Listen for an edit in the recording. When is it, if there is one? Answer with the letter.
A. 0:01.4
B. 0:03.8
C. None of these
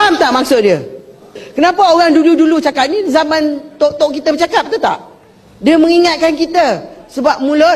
A